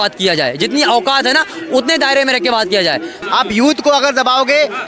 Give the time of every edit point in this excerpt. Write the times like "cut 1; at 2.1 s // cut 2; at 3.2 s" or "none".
cut 1; at 3.2 s